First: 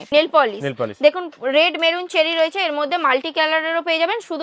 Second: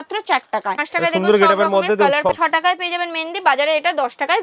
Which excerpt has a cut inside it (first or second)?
second